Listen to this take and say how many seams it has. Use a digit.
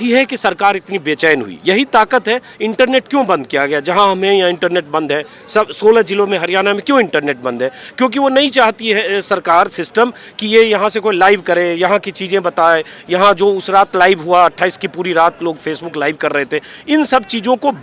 0